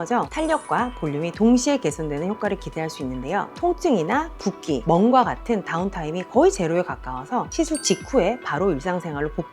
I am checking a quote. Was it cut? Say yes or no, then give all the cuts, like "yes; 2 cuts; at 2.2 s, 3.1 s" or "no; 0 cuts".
yes; 1 cut; at 3.5 s